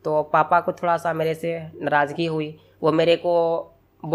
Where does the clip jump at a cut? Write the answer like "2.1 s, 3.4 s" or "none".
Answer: none